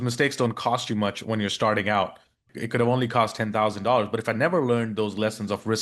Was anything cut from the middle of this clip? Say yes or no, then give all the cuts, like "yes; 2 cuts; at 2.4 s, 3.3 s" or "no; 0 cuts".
yes; 1 cut; at 2.4 s